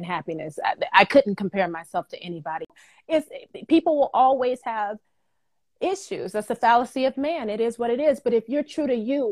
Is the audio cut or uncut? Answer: cut